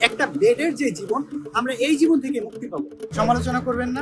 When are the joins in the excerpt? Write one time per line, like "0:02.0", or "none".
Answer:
0:03.0